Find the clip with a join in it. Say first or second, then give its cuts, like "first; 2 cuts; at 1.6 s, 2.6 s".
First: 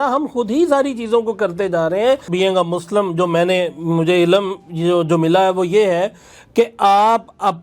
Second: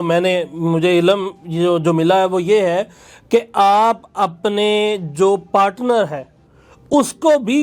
first; 1 cut; at 2.3 s